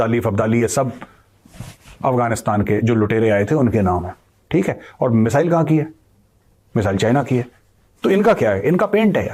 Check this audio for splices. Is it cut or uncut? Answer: uncut